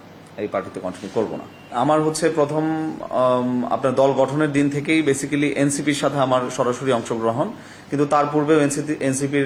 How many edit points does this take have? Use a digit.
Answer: 0